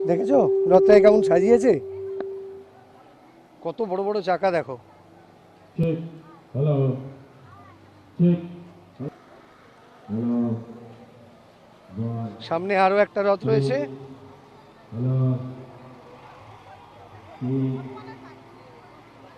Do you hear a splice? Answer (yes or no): no